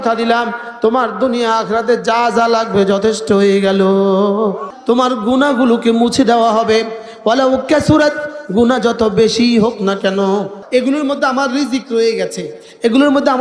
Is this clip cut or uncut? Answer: cut